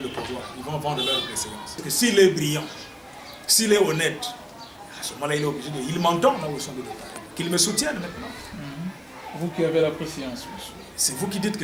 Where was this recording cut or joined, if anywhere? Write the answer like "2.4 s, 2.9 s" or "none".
1.9 s